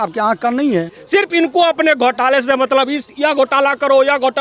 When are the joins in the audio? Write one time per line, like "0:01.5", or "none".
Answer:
0:01.0